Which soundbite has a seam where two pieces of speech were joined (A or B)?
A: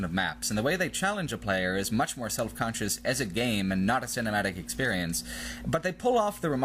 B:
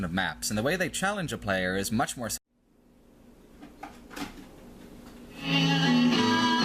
A